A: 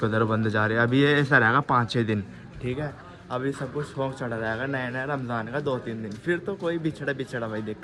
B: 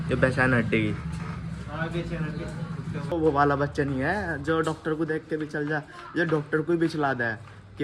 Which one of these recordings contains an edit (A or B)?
B